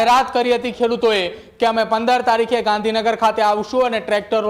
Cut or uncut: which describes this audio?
uncut